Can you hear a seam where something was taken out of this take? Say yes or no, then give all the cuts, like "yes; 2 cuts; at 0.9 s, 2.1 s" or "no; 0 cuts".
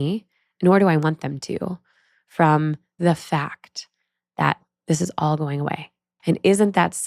yes; 3 cuts; at 3.0 s, 4.6 s, 6.1 s